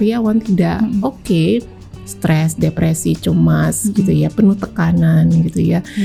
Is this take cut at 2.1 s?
no; 0 cuts

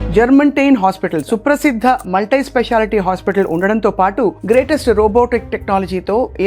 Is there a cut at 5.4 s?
no; 1 cut; at 1.2 s

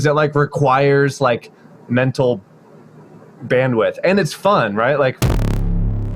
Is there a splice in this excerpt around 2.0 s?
no; 1 cut; at 5.2 s

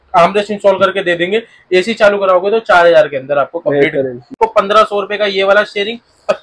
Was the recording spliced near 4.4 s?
yes; 1 cut; at 4.4 s

